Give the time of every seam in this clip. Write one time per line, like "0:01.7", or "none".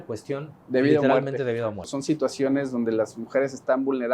0:01.9